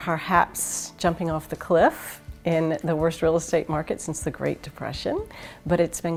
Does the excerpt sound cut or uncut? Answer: uncut